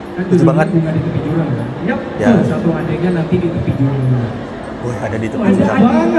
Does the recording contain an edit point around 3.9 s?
no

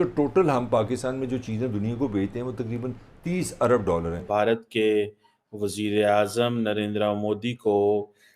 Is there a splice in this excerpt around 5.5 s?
no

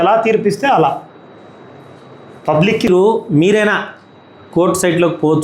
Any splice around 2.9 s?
yes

